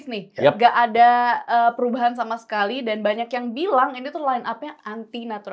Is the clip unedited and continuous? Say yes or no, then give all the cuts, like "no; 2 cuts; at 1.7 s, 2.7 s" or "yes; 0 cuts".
yes; 0 cuts